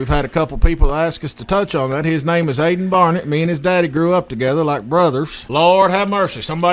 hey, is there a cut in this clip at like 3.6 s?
no; 1 cut; at 5.4 s

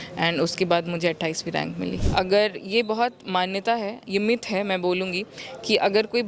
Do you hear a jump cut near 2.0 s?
yes; 1 cut; at 2.0 s

